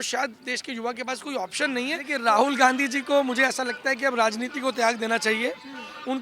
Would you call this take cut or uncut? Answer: cut